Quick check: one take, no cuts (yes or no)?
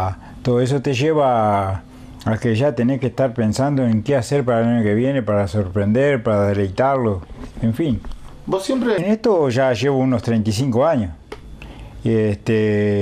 no